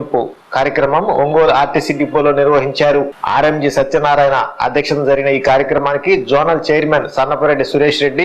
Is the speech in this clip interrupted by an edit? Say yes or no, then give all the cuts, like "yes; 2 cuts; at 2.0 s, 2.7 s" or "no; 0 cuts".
yes; 2 cuts; at 1.4 s, 3.2 s